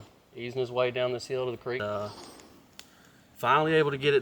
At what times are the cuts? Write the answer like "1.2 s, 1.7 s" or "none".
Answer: 1.8 s